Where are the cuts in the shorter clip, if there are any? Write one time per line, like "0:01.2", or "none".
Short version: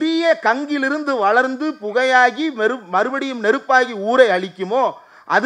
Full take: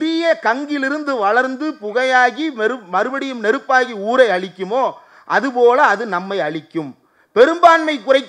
none